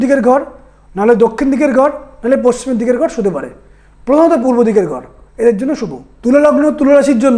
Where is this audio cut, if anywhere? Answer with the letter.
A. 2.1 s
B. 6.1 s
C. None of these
B